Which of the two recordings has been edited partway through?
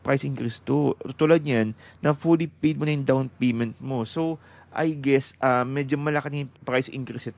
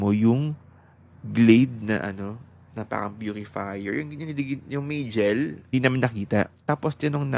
second; 2 cuts; at 5.7 s, 6.6 s

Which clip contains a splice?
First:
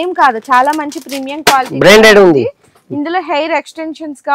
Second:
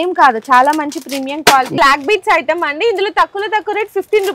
second; 1 cut; at 1.7 s

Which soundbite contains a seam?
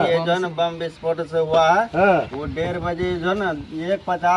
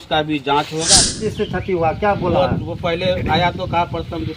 second; 1 cut; at 1.2 s

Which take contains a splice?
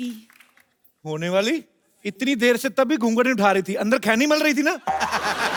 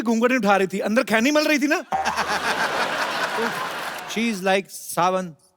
second; 1 cut; at 3.9 s

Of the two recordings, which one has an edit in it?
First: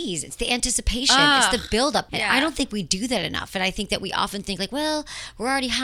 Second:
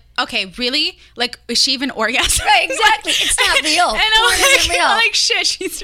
first; 1 cut; at 2.1 s

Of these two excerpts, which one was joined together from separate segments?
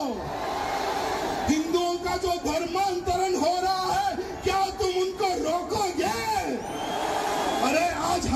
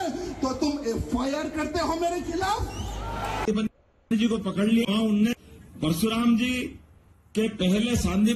second; 1 cut; at 3.4 s

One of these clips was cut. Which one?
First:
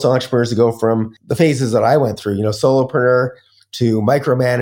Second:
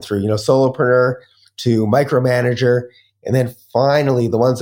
first; 1 cut; at 1.2 s

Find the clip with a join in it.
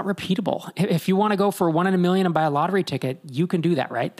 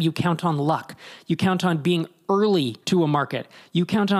second; 1 cut; at 2.8 s

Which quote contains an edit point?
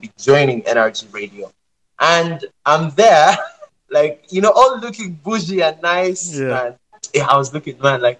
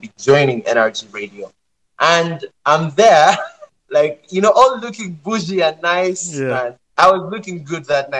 first; 1 cut; at 6.8 s

